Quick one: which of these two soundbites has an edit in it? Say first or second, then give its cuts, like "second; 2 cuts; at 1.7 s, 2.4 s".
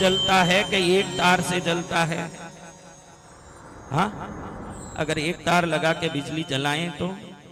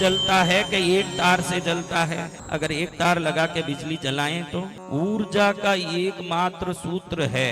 second; 2 cuts; at 2.4 s, 4.8 s